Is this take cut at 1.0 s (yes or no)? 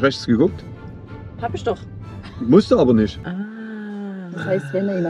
no